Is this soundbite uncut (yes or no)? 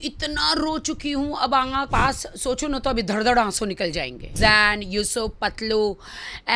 no